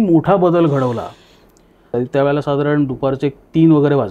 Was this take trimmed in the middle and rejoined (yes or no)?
yes